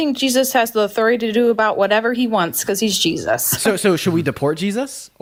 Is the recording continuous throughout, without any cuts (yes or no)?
yes